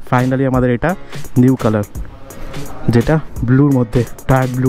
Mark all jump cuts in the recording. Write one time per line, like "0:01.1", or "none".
none